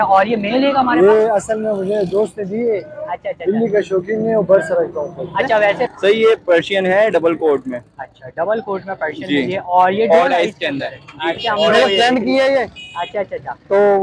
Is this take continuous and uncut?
no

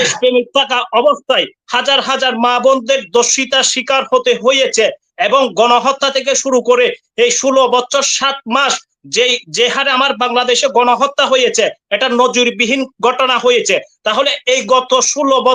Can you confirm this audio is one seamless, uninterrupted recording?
yes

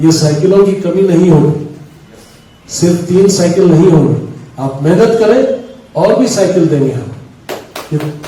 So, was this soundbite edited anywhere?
no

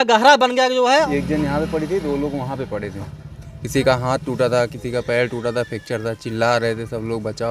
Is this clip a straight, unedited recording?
no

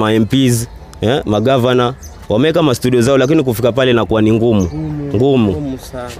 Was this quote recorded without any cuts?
yes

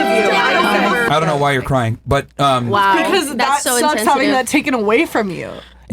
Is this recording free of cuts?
no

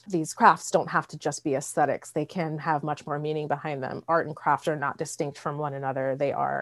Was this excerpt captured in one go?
yes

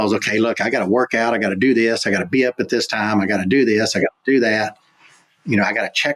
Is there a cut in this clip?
no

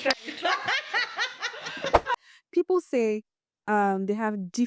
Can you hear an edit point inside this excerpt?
yes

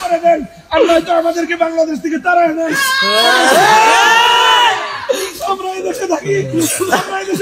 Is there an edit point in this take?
no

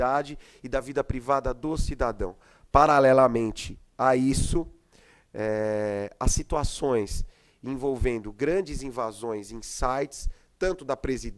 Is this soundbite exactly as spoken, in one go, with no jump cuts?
no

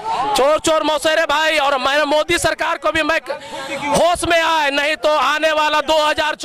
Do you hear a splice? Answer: no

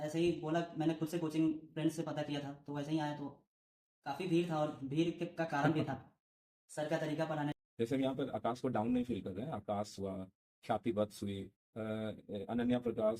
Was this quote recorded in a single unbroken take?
no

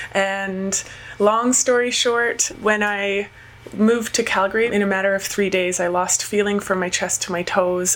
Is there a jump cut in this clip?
yes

